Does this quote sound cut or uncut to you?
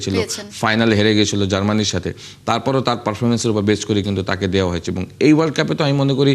uncut